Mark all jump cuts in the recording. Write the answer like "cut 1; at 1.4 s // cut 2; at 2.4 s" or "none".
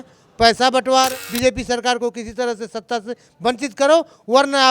cut 1; at 1.1 s